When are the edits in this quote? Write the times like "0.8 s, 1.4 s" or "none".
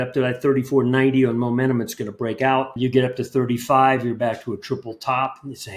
2.7 s